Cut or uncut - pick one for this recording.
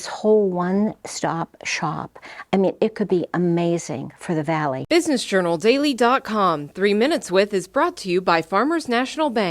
cut